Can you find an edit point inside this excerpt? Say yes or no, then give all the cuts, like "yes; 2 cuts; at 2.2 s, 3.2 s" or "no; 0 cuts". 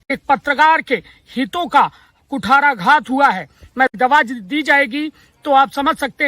yes; 1 cut; at 3.9 s